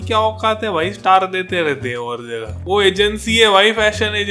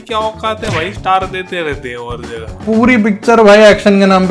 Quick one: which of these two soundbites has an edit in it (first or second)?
second